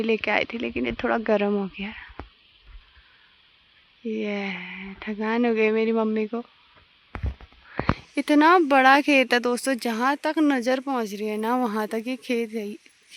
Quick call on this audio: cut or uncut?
uncut